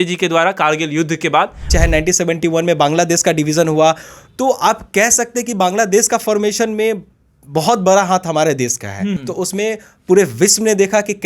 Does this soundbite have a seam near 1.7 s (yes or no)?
yes